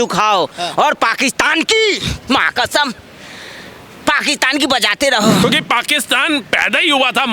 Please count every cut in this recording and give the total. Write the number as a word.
one